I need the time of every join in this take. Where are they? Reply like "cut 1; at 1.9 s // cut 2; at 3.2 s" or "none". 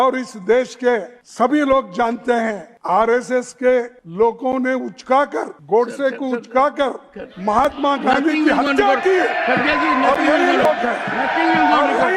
cut 1; at 1.2 s // cut 2; at 2.7 s // cut 3; at 4.0 s // cut 4; at 5.5 s